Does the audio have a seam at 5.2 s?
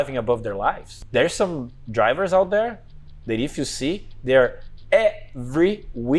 no; 1 cut; at 1.0 s

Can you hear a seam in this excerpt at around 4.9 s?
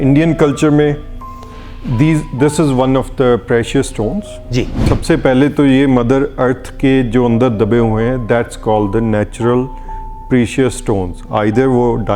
yes; 1 cut; at 4.9 s

